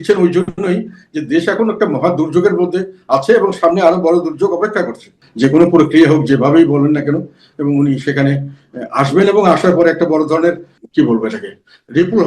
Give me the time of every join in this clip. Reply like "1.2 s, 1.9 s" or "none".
5.2 s, 10.7 s

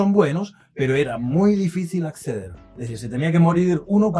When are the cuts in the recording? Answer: none

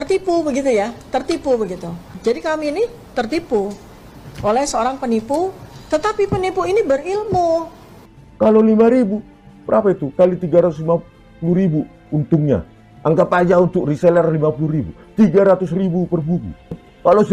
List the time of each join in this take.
none

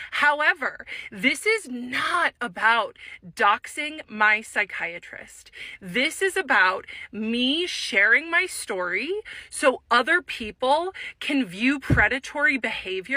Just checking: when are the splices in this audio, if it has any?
none

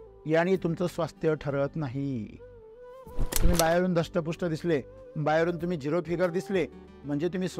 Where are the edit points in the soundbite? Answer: none

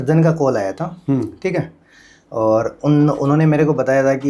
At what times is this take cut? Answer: none

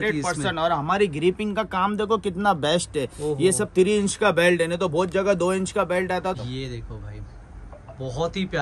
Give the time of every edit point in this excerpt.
6.4 s

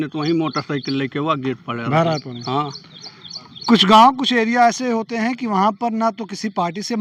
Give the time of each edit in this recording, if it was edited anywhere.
none

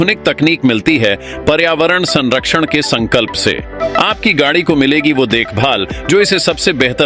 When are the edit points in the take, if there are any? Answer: 3.8 s

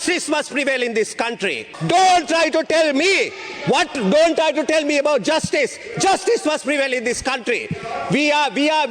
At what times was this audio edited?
1.7 s

